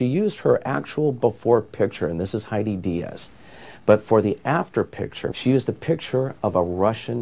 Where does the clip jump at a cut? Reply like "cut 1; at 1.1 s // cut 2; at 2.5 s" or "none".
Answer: cut 1; at 5.2 s